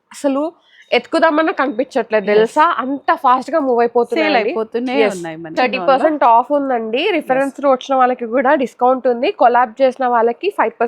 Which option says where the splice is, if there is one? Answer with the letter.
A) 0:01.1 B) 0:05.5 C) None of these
B